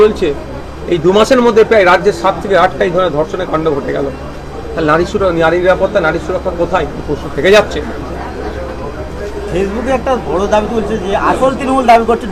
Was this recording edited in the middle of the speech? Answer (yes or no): no